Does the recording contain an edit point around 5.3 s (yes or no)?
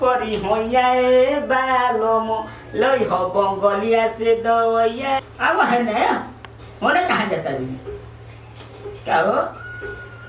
yes